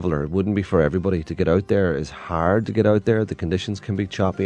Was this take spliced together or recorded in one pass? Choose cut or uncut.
uncut